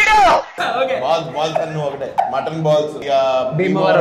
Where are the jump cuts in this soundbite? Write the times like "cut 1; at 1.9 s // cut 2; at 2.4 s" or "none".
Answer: cut 1; at 2.0 s // cut 2; at 3.0 s